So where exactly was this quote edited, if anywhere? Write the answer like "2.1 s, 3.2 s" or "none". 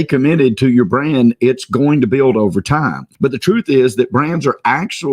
3.0 s